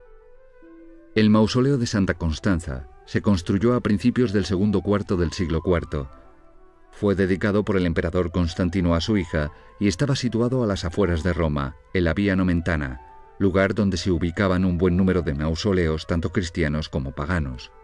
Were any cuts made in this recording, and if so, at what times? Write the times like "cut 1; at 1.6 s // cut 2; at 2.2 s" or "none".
cut 1; at 8.3 s